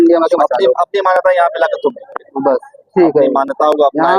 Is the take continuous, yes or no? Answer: yes